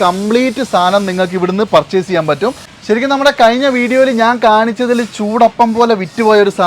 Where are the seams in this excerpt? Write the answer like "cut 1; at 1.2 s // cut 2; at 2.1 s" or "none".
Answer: cut 1; at 2.8 s